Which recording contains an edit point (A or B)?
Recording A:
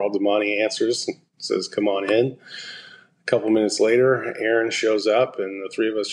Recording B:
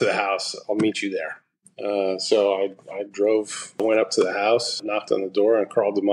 B